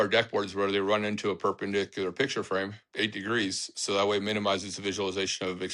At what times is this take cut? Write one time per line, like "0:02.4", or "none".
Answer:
none